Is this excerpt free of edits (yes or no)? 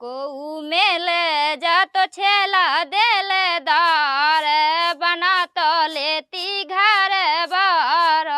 yes